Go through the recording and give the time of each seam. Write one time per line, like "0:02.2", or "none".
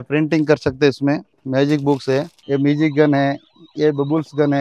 0:01.3
0:02.4